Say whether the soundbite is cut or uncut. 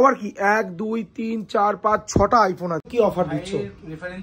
cut